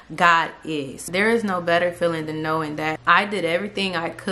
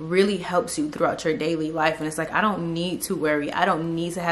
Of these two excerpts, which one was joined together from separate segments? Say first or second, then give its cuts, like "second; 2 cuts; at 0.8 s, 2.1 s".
first; 1 cut; at 1.1 s